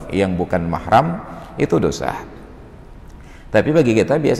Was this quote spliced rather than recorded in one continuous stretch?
no; 0 cuts

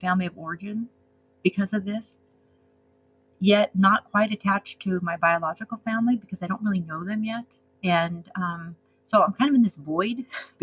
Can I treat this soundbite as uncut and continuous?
yes; 0 cuts

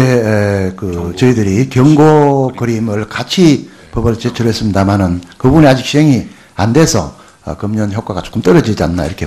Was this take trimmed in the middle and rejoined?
yes; 1 cut; at 6.3 s

